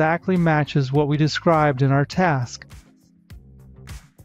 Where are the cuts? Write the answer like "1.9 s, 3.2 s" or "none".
none